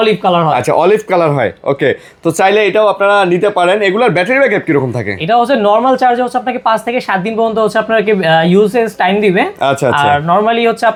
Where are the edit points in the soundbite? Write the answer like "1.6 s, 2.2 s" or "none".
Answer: none